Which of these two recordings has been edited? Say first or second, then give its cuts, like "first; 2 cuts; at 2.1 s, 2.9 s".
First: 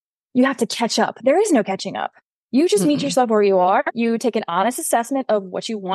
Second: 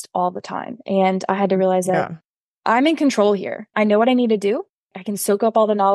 second; 2 cuts; at 3.7 s, 4.9 s